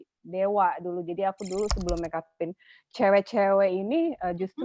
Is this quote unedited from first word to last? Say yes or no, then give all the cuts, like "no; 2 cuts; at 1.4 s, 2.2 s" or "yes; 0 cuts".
yes; 0 cuts